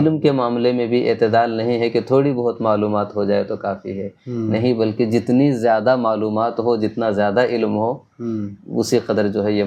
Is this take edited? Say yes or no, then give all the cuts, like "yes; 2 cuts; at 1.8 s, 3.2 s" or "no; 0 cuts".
no; 0 cuts